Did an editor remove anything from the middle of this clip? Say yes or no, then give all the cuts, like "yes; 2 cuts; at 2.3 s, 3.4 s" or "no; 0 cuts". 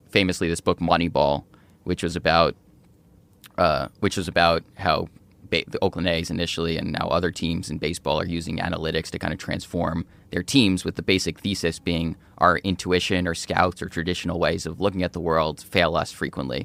no; 0 cuts